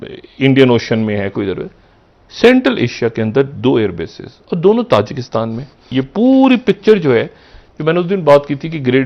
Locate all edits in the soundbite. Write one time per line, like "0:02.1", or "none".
0:05.7